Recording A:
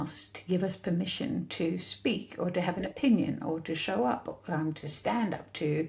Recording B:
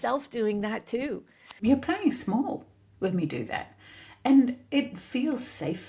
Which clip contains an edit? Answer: B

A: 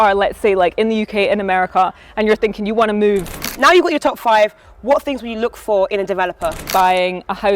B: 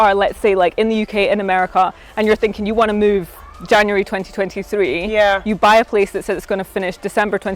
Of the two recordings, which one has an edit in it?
A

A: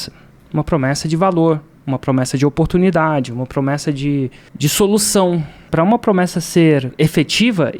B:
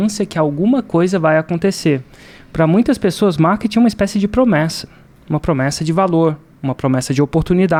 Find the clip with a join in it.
A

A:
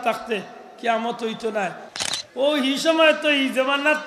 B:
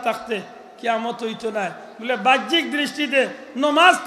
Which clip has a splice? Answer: A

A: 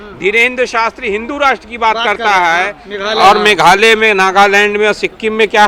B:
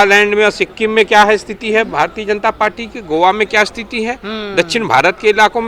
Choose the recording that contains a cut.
A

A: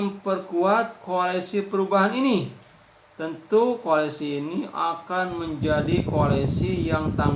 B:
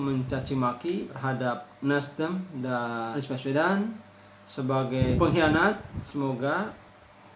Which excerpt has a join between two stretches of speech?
B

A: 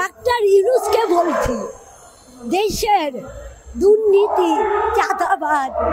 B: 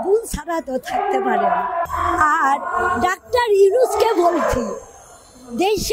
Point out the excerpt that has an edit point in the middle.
B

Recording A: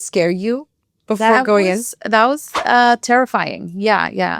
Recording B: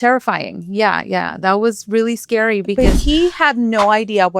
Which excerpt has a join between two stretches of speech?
B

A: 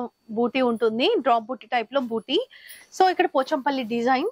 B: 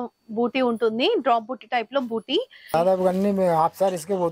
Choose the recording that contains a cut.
B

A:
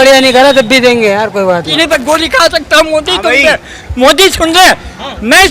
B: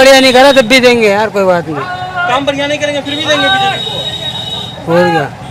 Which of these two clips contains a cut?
A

